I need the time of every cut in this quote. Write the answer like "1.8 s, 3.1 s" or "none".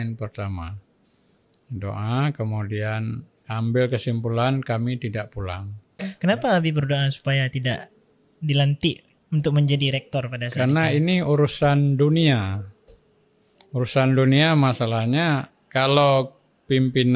6.1 s